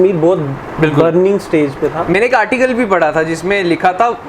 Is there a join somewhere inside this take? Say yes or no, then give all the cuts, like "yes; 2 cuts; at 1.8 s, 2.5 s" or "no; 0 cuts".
no; 0 cuts